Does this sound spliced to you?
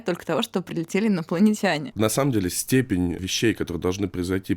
yes; 2 cuts; at 1.9 s, 3.2 s

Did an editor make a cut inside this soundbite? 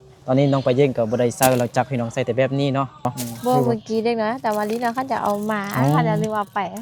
yes; 1 cut; at 3.2 s

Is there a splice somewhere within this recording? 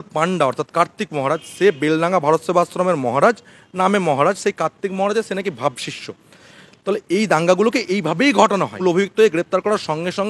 yes; 1 cut; at 8.8 s

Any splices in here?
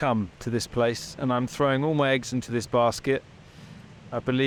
no; 0 cuts

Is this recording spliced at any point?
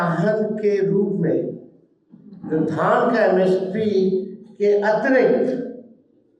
no; 0 cuts

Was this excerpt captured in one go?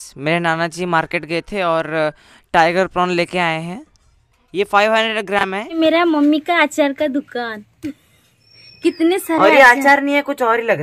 no; 1 cut; at 5.8 s

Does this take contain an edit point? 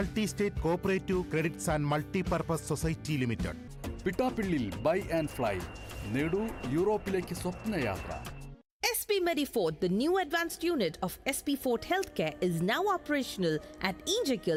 no; 0 cuts

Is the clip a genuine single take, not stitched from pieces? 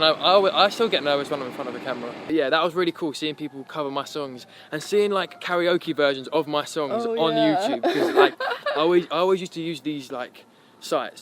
no; 1 cut; at 2.2 s

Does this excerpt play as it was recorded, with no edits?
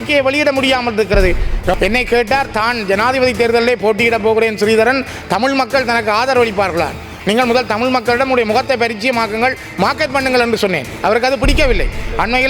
no; 2 cuts; at 1.7 s, 7.1 s

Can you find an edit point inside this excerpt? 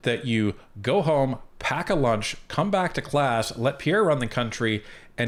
no; 0 cuts

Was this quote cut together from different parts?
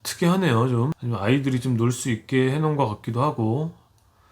yes; 1 cut; at 0.9 s

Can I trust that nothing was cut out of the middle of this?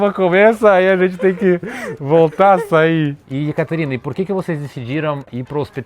no; 1 cut; at 3.2 s

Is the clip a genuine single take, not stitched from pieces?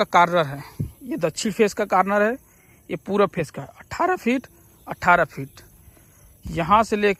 yes; 0 cuts

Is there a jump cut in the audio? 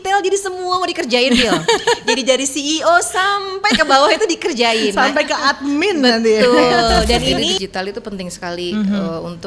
yes; 1 cut; at 7.6 s

